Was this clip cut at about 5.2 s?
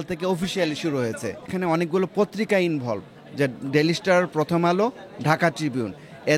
no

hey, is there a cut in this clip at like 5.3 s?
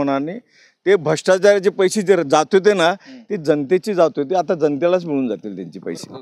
no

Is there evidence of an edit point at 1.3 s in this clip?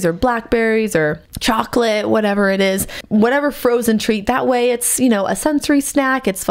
yes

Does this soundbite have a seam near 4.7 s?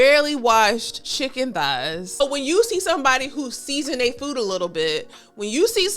no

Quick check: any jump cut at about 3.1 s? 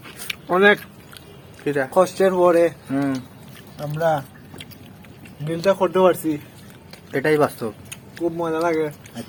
no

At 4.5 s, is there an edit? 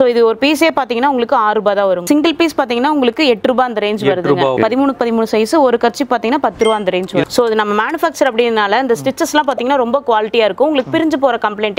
yes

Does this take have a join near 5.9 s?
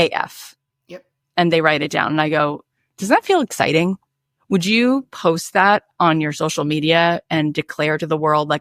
no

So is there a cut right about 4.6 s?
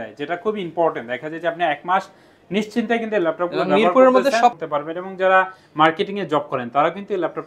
yes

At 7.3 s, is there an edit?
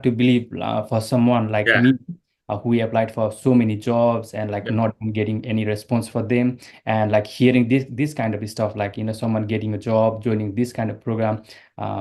no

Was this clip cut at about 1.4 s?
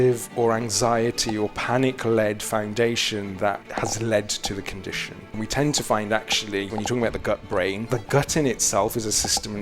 no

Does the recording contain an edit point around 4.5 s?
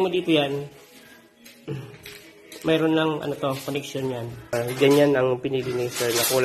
yes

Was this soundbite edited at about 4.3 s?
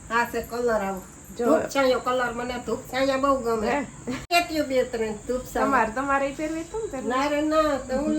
yes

